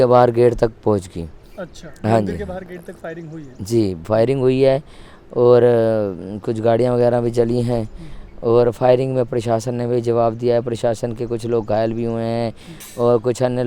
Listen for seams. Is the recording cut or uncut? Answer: uncut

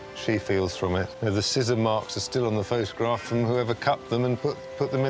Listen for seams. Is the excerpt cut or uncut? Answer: cut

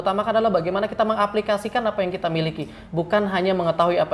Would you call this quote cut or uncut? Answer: uncut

